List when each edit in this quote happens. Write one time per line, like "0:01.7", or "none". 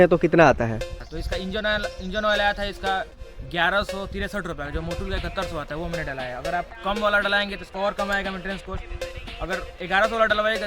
0:01.0

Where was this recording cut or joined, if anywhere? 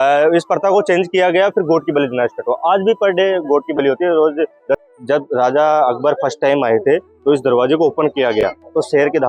0:04.9

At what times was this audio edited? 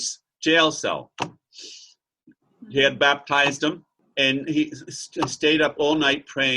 0:04.0

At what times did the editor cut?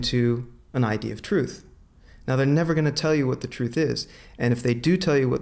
none

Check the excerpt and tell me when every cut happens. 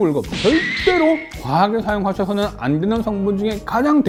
none

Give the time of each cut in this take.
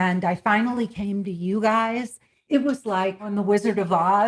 0:02.4
0:03.3

